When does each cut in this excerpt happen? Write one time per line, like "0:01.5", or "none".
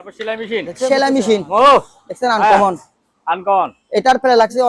none